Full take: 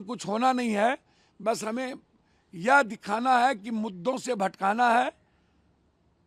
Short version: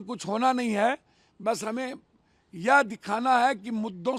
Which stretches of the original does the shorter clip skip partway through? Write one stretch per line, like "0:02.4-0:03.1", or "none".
none